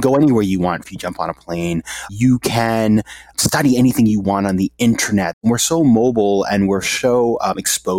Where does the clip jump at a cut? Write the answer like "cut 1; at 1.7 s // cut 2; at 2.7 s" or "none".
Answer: cut 1; at 0.9 s // cut 2; at 2.1 s // cut 3; at 3.3 s // cut 4; at 5.4 s